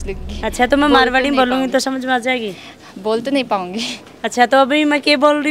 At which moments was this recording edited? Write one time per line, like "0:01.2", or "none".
none